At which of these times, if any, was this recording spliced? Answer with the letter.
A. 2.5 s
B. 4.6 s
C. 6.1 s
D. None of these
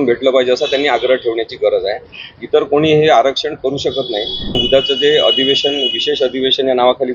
B